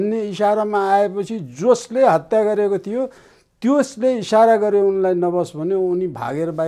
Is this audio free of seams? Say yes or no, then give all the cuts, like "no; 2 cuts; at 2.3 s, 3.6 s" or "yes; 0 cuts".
yes; 0 cuts